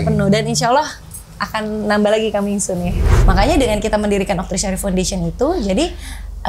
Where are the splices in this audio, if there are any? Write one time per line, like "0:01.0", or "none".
0:03.1